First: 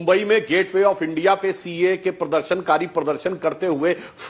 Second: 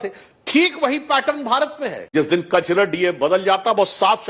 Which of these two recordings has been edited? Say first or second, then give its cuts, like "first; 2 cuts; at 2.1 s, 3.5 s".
second; 1 cut; at 2.0 s